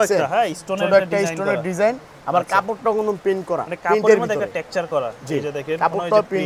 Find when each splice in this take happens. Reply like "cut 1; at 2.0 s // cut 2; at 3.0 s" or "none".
none